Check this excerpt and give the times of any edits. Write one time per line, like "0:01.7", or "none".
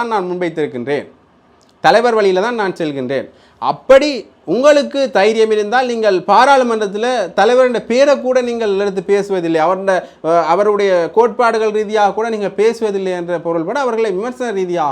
none